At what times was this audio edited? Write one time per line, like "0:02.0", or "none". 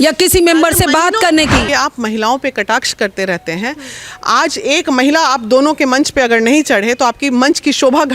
0:01.7